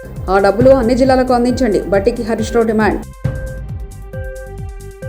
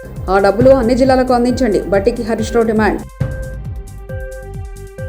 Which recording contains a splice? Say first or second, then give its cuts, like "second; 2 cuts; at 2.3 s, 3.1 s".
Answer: second; 1 cut; at 3.2 s